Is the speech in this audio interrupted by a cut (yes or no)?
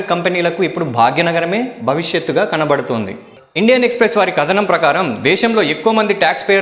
no